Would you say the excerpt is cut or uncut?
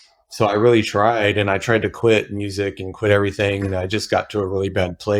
uncut